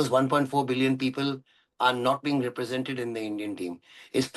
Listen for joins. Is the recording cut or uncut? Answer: uncut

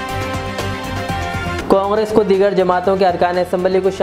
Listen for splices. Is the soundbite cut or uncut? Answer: cut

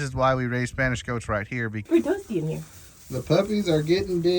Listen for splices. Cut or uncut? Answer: cut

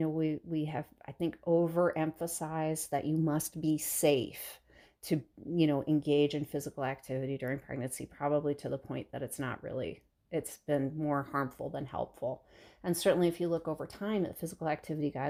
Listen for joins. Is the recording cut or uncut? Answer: uncut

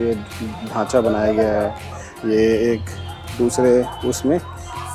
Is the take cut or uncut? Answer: uncut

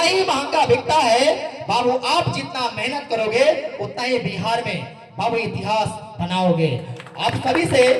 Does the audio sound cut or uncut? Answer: uncut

